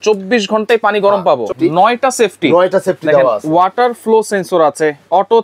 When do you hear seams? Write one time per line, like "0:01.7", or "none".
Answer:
0:01.5